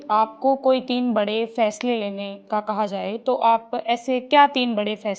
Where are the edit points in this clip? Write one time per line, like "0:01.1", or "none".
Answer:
none